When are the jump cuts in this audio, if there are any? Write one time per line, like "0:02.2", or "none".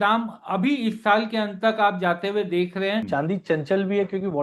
0:03.0